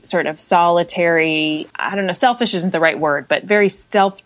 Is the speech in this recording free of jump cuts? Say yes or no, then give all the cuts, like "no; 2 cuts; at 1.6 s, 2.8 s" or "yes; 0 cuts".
no; 1 cut; at 1.7 s